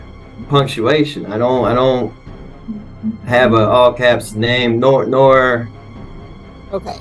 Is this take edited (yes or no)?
no